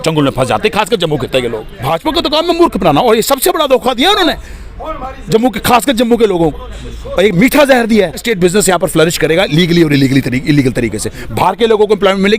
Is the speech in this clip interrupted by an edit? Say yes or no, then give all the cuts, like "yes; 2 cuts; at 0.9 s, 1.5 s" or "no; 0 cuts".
yes; 2 cuts; at 1.7 s, 8.2 s